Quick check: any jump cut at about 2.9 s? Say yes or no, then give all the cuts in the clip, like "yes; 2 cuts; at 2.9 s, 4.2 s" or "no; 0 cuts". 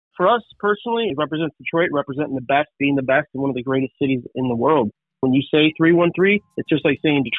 no; 3 cuts; at 1.1 s, 5.2 s, 6.5 s